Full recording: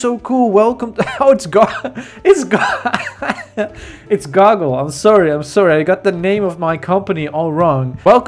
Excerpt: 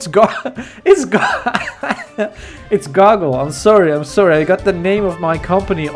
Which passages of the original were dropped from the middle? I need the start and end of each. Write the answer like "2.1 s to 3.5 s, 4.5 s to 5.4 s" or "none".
none